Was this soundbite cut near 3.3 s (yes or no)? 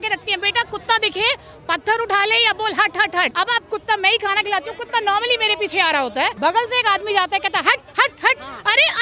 yes